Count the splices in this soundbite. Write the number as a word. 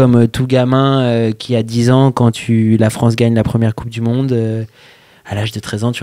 zero